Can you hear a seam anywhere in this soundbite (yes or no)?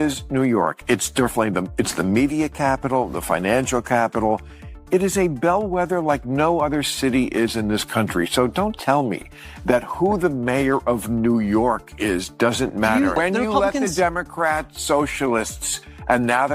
yes